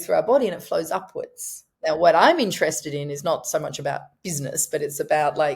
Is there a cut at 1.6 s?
yes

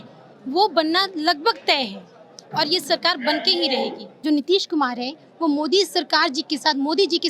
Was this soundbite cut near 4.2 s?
yes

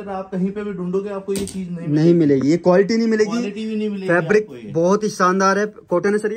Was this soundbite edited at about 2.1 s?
no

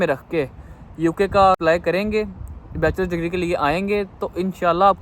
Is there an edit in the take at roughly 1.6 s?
yes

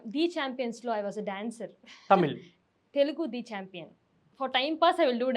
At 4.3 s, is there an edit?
yes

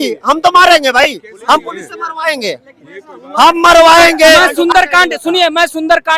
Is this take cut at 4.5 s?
yes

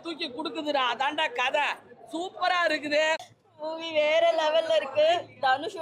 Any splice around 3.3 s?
yes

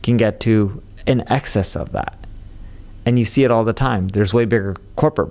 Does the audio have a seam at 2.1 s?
no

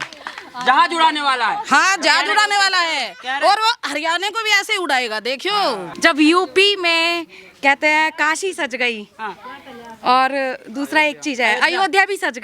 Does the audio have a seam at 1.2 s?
no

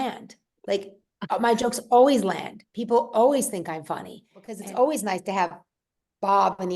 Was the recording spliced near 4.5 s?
yes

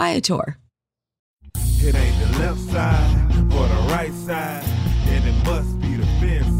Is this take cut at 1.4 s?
yes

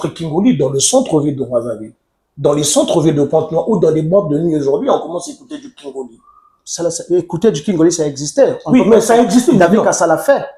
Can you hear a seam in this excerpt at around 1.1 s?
no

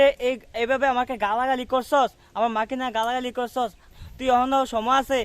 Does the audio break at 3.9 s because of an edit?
yes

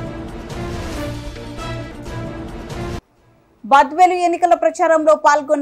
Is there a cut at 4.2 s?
no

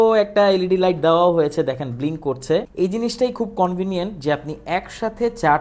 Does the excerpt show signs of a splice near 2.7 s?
yes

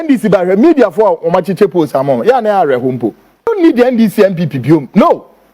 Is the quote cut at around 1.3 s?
no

